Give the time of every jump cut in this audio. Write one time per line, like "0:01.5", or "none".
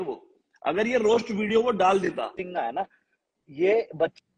0:02.4